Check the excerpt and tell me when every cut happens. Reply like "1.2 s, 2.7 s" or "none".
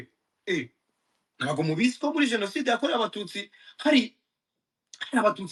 none